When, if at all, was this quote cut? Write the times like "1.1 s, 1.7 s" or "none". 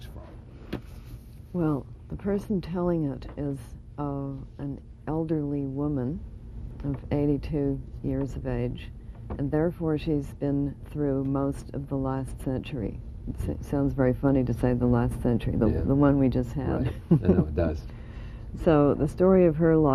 1.8 s